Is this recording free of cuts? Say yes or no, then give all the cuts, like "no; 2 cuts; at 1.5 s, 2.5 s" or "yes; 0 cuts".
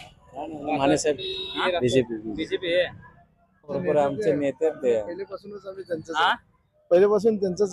no; 2 cuts; at 1.6 s, 3.8 s